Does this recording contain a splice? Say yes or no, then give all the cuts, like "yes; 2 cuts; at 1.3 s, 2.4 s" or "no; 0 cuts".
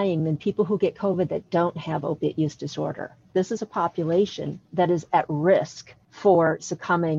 yes; 1 cut; at 3.2 s